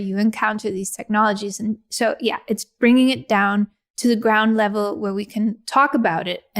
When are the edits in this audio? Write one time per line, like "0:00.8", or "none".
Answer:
0:03.8